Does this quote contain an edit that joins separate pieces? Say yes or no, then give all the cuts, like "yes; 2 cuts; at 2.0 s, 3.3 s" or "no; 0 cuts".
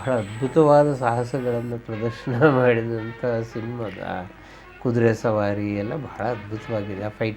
no; 0 cuts